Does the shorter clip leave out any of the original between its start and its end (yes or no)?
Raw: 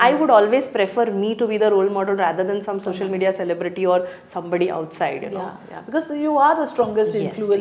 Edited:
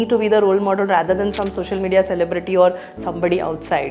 no